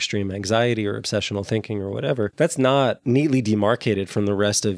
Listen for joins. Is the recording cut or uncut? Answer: cut